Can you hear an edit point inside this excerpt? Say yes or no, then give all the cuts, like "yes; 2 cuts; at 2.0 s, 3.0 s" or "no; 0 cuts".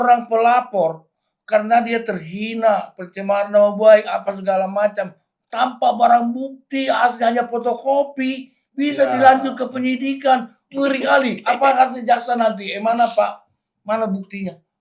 no; 0 cuts